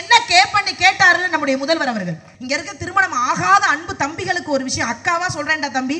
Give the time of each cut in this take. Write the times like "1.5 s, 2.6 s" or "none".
2.3 s